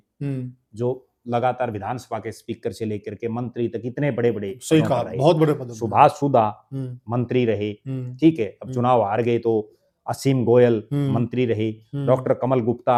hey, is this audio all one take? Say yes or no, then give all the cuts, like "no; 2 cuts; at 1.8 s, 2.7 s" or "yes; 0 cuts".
yes; 0 cuts